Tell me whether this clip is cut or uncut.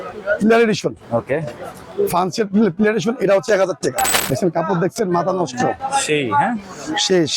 cut